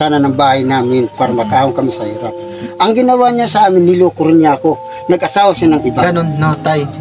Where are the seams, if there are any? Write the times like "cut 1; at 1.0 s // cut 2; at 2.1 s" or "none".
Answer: cut 1; at 6.0 s